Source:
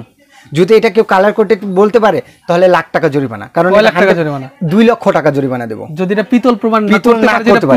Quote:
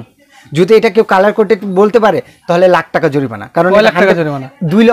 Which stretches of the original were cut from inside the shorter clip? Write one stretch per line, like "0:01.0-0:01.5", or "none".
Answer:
none